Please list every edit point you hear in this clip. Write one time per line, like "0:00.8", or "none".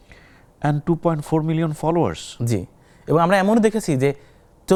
none

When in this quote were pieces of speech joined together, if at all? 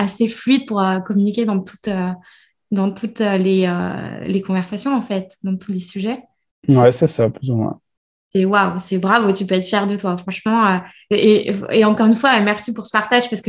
none

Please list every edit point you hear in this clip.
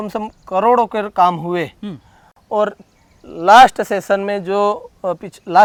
none

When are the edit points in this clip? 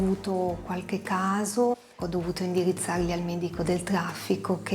0:01.9

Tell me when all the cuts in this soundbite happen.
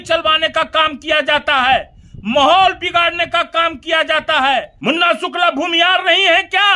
0:04.7

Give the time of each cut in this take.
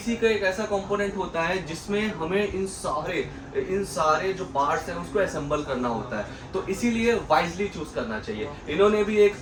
none

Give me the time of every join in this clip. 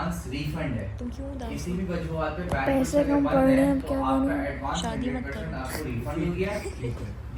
none

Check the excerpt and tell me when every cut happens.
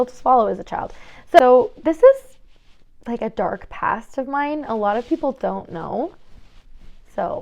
0:01.4

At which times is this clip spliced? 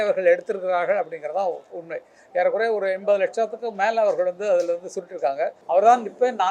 0:05.6

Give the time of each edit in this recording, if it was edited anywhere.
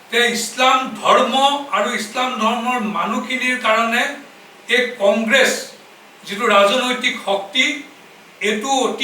none

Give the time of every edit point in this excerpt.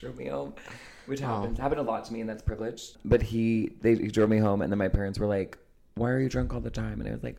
0:03.0

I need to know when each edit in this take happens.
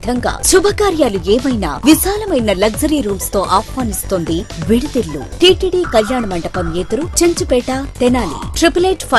0:05.3

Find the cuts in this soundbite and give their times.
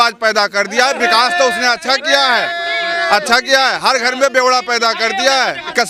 none

